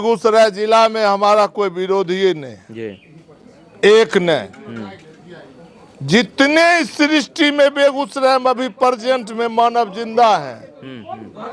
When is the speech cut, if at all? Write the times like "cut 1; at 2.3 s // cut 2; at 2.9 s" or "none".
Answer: none